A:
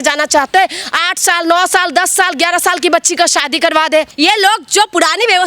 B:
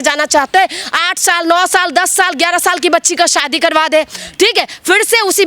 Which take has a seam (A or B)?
A